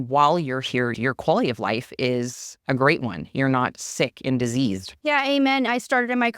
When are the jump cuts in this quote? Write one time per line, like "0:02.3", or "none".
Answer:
0:00.9
0:04.9